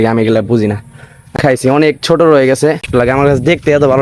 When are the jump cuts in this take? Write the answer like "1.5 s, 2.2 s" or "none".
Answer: 1.4 s, 2.9 s

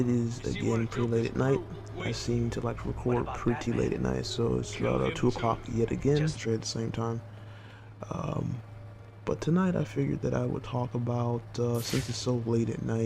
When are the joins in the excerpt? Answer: none

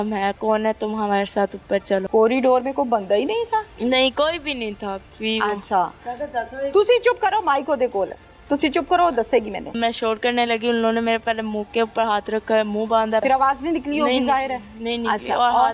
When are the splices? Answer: 2.1 s, 9.7 s, 13.2 s

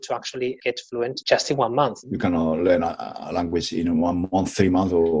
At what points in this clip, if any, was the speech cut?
1.0 s, 2.0 s

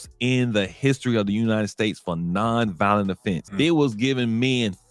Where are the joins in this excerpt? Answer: 3.4 s

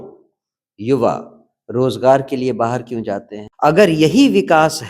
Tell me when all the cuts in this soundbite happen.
3.4 s

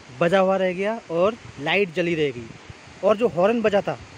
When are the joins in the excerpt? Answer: 2.7 s

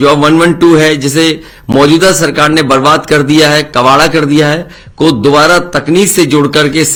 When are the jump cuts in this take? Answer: none

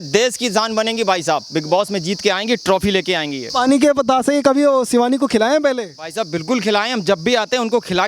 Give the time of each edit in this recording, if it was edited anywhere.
3.4 s

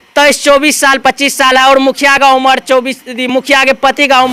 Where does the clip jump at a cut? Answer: none

